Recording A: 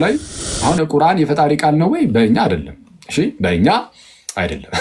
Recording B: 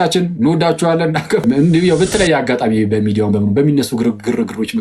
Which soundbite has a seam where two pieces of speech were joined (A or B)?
B